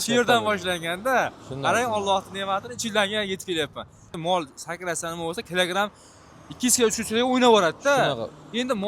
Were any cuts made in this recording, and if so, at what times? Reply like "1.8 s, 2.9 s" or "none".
4.1 s